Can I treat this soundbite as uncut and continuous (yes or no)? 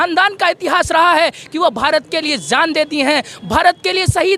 yes